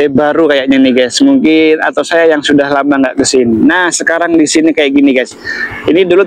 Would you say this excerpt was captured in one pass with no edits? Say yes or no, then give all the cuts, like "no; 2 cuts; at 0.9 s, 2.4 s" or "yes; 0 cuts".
yes; 0 cuts